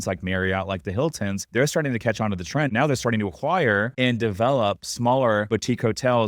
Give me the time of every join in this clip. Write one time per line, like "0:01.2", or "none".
0:01.4
0:02.7
0:03.9
0:05.5